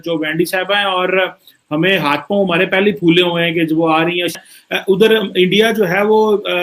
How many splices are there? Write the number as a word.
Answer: one